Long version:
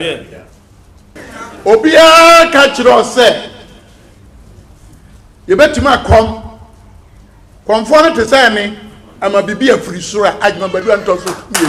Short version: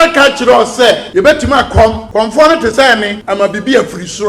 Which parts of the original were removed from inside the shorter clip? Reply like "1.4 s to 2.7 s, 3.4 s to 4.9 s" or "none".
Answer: 3.4 s to 5.4 s, 6.4 s to 7.6 s, 8.7 s to 9.1 s